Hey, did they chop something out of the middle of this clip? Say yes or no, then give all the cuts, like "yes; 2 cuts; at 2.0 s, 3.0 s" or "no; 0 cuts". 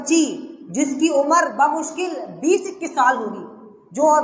no; 0 cuts